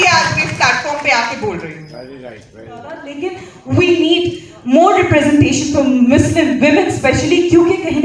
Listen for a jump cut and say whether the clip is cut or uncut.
cut